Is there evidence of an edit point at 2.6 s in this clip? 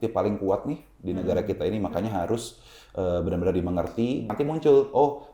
no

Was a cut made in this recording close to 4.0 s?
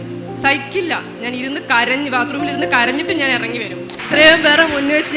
yes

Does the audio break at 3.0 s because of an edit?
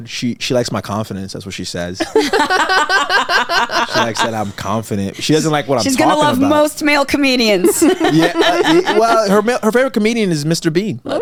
no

